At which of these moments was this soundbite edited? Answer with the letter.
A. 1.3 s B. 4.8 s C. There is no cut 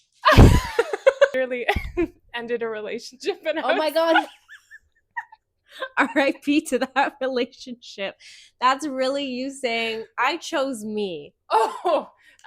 A